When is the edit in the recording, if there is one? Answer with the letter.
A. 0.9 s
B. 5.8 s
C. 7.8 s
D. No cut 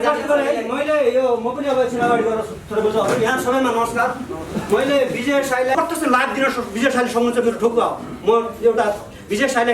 B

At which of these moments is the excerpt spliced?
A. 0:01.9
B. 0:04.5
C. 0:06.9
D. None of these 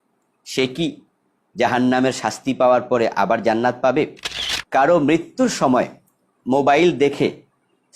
B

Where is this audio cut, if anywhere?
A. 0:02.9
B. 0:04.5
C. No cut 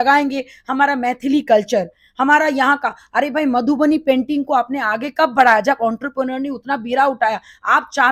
C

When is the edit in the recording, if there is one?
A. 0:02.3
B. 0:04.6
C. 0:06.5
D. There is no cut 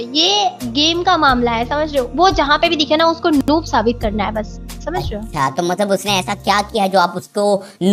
D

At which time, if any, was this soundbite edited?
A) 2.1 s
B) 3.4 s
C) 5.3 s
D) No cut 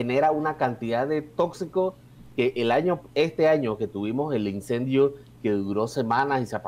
D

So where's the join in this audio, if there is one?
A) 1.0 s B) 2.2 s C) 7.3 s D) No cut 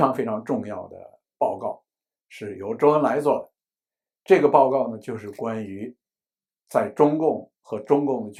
D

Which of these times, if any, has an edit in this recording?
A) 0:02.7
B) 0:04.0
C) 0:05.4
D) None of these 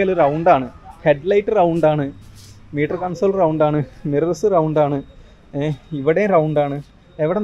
D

